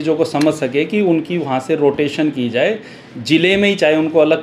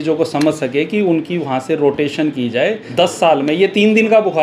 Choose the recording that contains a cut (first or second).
second